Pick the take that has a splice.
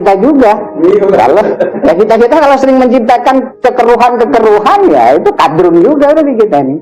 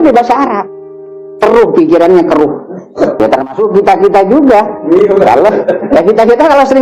second; 1 cut; at 3.2 s

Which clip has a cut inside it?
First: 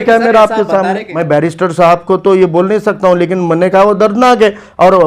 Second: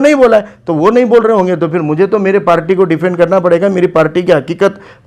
first; 1 cut; at 1.1 s

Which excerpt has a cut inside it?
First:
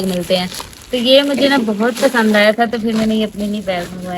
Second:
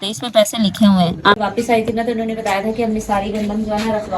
second; 1 cut; at 1.4 s

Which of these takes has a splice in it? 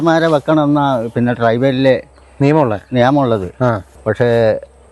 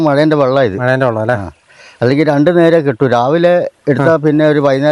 first; 1 cut; at 3.9 s

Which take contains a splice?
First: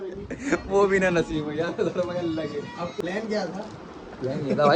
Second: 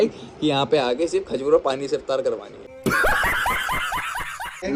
first; 1 cut; at 3.0 s

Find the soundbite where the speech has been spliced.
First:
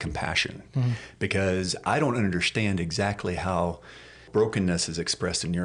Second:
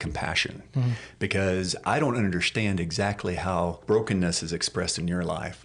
second; 1 cut; at 3.8 s

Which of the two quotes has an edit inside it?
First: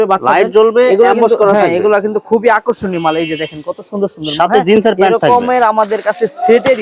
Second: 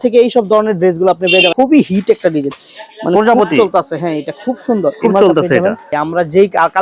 second; 2 cuts; at 1.5 s, 6.0 s

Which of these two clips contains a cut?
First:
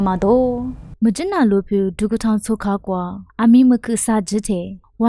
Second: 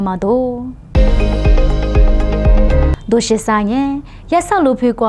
second; 2 cuts; at 0.8 s, 2.9 s

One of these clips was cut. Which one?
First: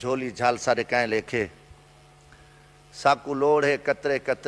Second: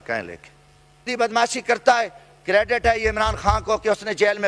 second; 1 cut; at 1.1 s

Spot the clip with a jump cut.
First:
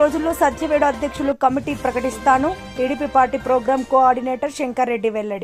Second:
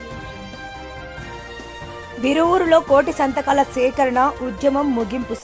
second; 1 cut; at 2.0 s

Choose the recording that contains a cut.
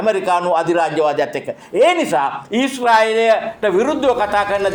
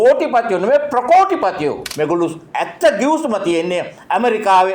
second; 1 cut; at 1.9 s

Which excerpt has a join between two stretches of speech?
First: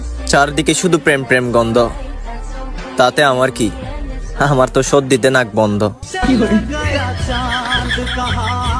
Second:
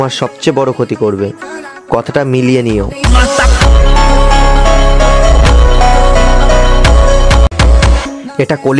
second; 1 cut; at 7.4 s

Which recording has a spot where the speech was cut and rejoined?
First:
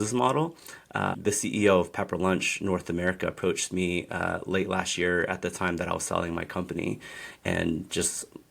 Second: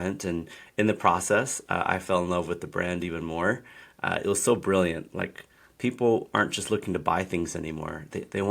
first; 1 cut; at 1.2 s

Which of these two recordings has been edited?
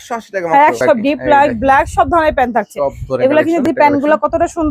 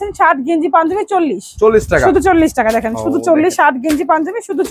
first; 2 cuts; at 0.8 s, 3.6 s

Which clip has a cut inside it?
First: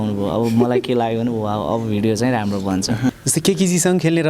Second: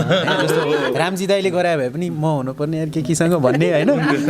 first; 1 cut; at 3.2 s

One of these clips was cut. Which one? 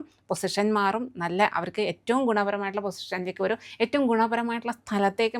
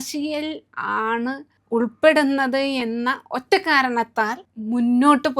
second; 2 cuts; at 1.5 s, 4.4 s

